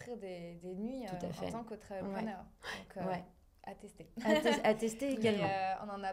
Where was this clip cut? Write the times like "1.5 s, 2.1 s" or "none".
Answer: none